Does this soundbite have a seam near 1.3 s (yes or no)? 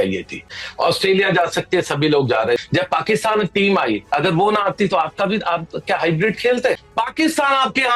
no